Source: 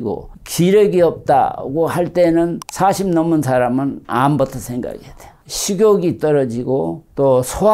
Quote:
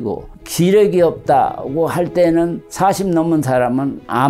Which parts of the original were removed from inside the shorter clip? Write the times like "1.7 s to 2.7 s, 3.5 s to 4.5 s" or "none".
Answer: none